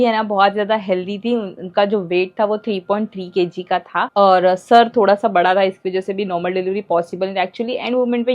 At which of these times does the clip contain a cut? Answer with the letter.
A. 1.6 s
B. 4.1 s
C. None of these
B